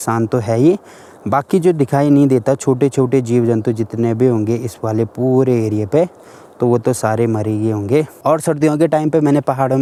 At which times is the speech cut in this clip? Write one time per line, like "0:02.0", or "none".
none